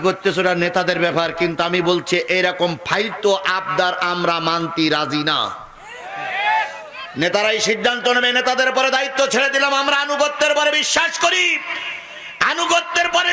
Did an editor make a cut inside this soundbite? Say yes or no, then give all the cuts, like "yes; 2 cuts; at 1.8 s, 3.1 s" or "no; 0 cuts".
no; 0 cuts